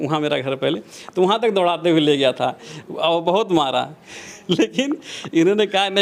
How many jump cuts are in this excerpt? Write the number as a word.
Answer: zero